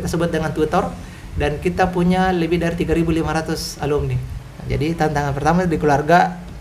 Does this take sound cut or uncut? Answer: cut